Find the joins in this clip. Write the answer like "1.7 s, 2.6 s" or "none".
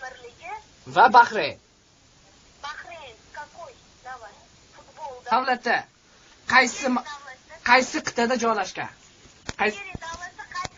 none